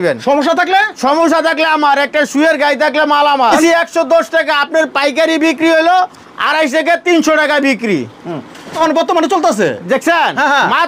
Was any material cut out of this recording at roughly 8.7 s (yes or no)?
yes